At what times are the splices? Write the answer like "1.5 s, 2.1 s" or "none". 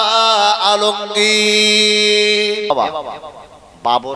2.7 s